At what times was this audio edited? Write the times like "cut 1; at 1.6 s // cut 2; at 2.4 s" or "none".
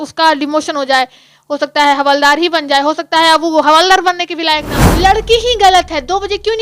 cut 1; at 4.8 s